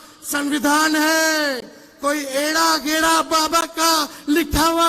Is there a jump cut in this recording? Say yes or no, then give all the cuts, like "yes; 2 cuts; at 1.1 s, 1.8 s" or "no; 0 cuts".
no; 0 cuts